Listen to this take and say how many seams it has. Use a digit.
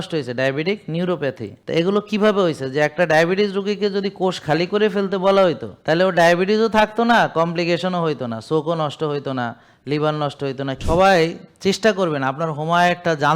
3